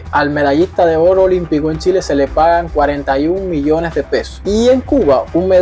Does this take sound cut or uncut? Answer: uncut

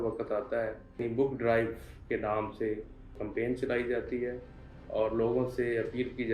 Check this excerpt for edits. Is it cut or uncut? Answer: cut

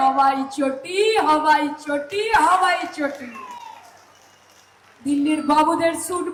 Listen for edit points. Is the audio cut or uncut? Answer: uncut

